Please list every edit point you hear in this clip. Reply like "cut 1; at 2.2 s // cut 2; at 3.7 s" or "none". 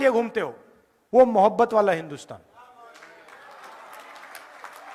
none